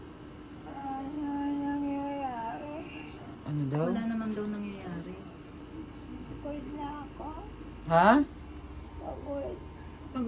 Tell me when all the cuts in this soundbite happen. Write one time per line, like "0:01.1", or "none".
0:05.6

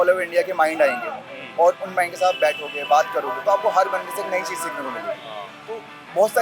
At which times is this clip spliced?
none

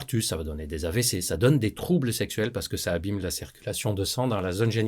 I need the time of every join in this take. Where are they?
none

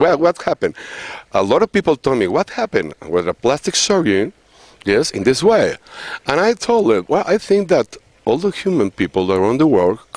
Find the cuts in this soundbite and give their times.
none

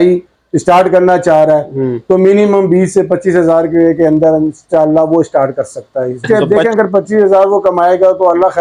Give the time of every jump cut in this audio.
0:06.2

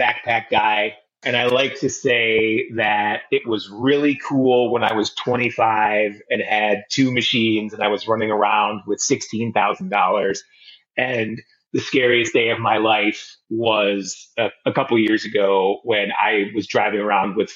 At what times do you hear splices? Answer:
0:01.2

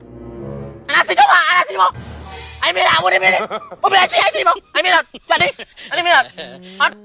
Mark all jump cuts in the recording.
none

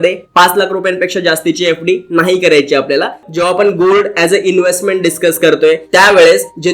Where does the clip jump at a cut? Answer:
0:03.3

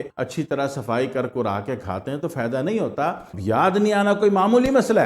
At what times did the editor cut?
0:03.3

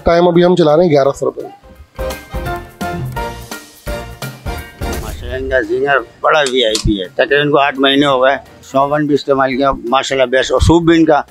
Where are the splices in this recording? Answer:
0:02.2
0:05.3
0:08.6

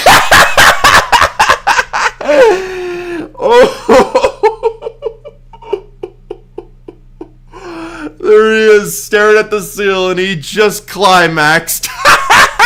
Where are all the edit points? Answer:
none

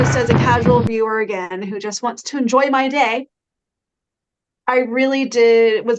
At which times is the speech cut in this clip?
none

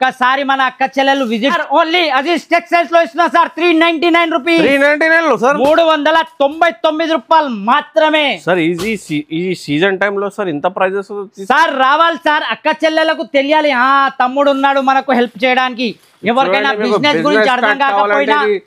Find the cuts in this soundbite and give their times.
0:01.6

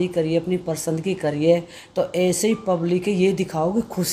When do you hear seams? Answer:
none

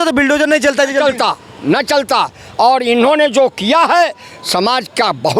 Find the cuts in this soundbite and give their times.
none

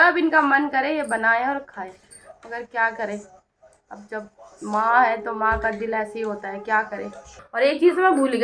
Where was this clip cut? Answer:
0:07.3

